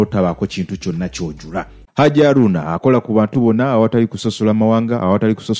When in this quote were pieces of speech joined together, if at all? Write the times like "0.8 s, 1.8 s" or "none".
none